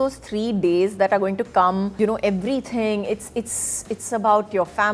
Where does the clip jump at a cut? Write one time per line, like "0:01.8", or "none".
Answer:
0:01.9

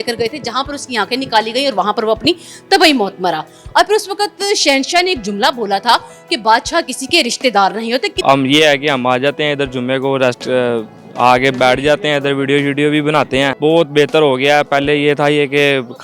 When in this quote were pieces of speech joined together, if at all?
0:08.2
0:13.5

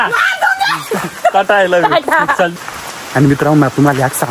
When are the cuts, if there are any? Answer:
0:02.9

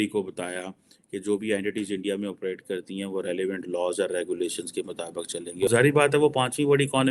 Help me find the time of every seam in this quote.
0:05.7

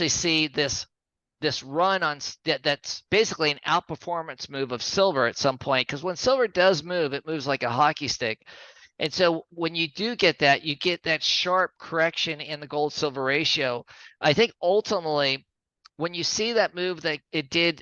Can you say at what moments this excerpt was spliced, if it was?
none

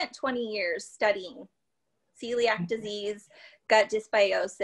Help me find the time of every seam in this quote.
none

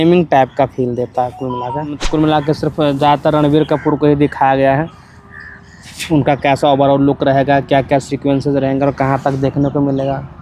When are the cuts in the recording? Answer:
0:02.0

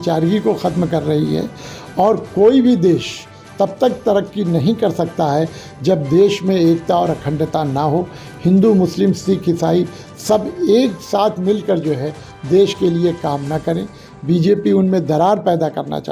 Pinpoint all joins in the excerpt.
none

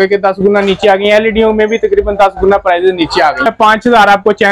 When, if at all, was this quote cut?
0:03.4

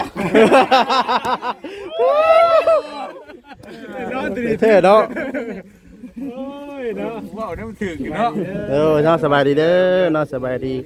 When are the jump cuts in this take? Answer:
none

